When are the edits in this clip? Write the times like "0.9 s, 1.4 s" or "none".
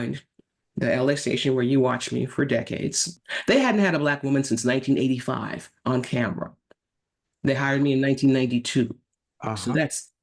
3.2 s